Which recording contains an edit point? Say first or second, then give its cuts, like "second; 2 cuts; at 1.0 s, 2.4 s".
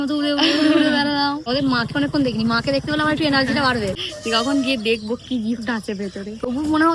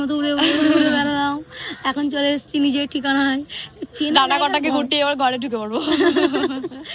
first; 2 cuts; at 1.5 s, 4.0 s